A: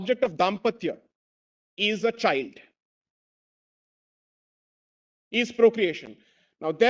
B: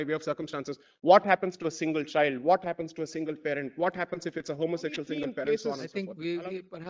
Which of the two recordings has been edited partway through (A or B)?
B